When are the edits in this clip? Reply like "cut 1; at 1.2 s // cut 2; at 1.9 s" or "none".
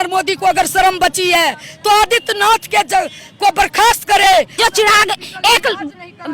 cut 1; at 4.6 s